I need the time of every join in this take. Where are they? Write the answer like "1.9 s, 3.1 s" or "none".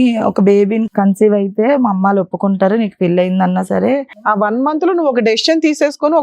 0.8 s, 4.3 s